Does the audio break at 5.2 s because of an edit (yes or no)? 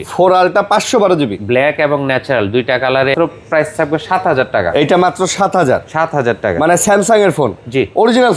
no